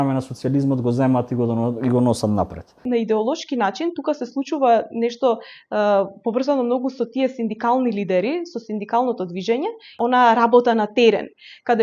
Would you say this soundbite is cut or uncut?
cut